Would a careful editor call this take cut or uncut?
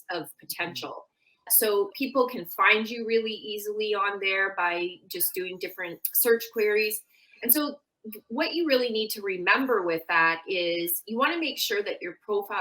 cut